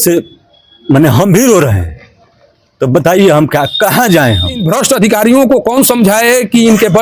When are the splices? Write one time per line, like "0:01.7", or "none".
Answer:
0:04.7